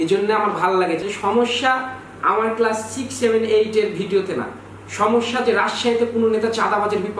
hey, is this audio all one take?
no; 1 cut; at 1.0 s

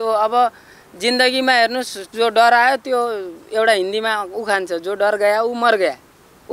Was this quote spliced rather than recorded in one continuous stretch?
no; 0 cuts

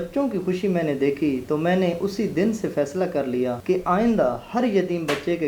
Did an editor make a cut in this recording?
yes; 1 cut; at 3.6 s

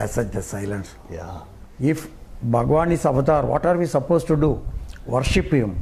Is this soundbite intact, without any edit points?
no; 1 cut; at 1.6 s

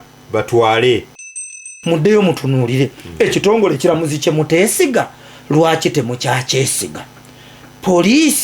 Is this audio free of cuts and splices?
no; 1 cut; at 1.4 s

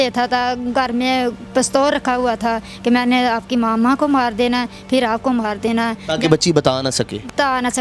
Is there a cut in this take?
no; 0 cuts

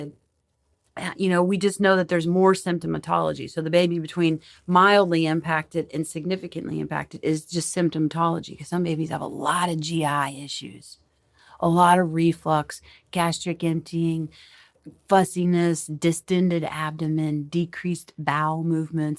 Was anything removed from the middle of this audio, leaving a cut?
no; 0 cuts

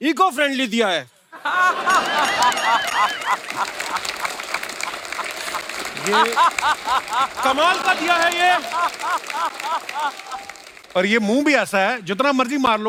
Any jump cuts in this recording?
no; 0 cuts

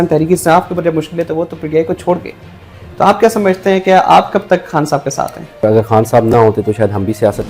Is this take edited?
yes; 1 cut; at 5.6 s

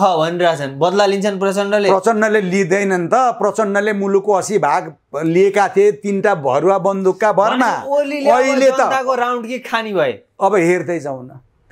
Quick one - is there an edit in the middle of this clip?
no; 0 cuts

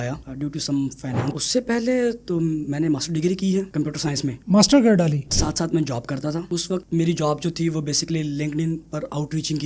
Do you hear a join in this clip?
yes; 2 cuts; at 1.2 s, 5.3 s

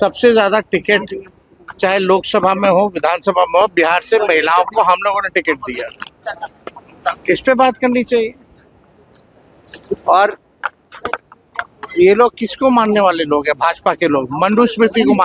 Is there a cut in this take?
no; 0 cuts

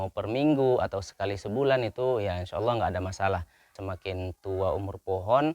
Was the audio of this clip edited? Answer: yes; 1 cut; at 3.8 s

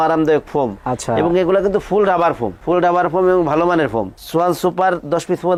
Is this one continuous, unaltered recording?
yes; 0 cuts

